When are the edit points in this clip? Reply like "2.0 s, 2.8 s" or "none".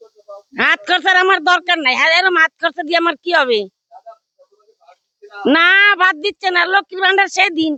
none